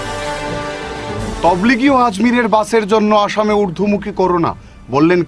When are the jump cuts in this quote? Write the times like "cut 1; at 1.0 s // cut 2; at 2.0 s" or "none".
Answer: cut 1; at 1.2 s

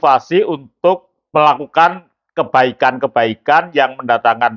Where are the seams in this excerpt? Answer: cut 1; at 1.1 s

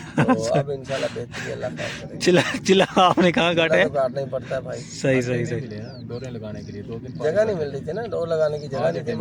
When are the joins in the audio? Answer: none

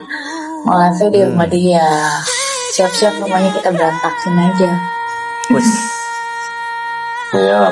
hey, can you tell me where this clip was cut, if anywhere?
none

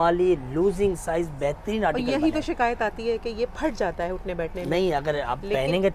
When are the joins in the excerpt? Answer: none

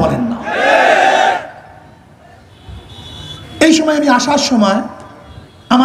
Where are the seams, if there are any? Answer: cut 1; at 3.4 s

